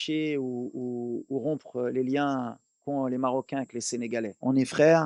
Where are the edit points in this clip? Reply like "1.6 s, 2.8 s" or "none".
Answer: none